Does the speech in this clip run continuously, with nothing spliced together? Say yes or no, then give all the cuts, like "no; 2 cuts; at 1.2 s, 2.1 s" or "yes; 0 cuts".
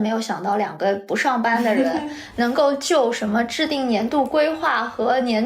yes; 0 cuts